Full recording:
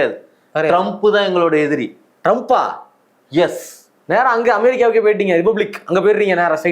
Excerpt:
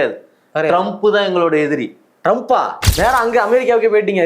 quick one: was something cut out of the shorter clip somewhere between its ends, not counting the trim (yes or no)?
yes